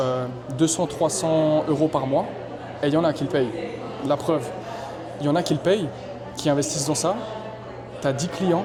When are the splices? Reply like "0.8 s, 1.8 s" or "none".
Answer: none